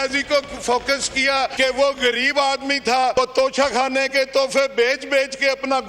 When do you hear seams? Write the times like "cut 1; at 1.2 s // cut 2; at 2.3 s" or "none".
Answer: cut 1; at 1.5 s // cut 2; at 3.1 s